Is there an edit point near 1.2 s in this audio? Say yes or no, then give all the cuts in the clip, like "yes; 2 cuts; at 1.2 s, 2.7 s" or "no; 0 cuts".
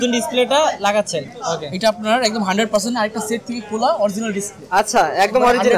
no; 0 cuts